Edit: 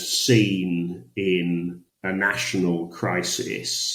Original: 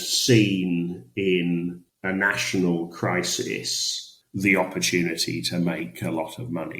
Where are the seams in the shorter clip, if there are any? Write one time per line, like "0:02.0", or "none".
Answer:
none